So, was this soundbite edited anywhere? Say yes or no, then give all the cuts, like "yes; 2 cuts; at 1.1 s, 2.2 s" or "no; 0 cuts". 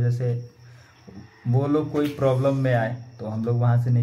no; 0 cuts